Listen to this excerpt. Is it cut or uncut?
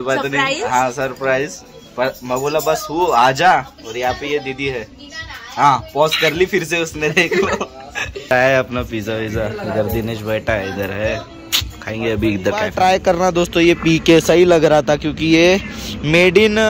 cut